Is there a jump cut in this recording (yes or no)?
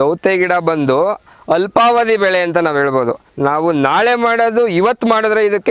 no